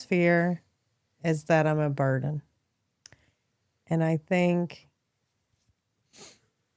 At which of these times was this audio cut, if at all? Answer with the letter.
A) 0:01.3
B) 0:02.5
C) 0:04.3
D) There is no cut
D